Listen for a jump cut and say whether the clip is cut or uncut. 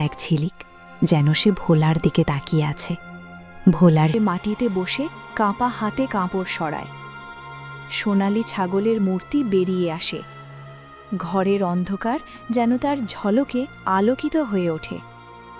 cut